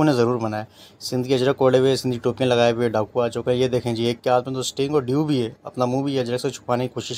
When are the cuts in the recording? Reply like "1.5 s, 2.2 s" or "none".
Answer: none